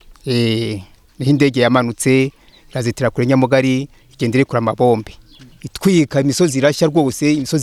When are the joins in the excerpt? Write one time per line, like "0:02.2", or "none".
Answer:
none